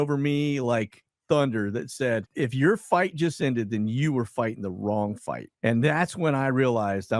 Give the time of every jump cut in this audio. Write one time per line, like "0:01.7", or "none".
0:02.3